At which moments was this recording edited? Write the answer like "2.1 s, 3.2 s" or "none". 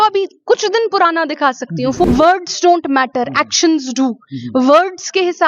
2.0 s